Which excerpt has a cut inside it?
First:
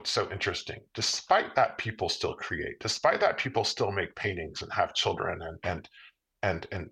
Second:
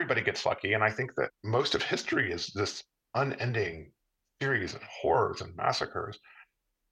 second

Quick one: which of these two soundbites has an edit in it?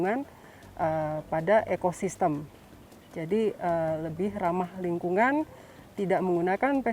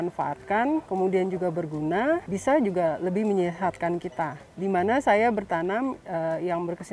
second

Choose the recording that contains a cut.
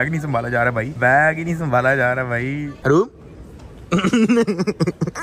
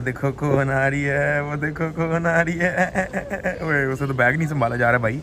first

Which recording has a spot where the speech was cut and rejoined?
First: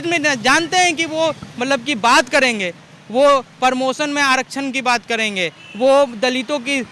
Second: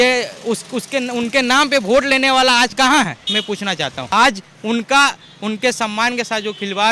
second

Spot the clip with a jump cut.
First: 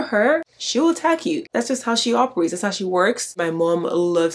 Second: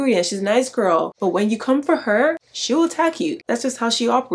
first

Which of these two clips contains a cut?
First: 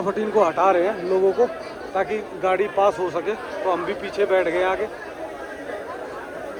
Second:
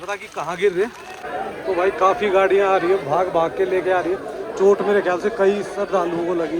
second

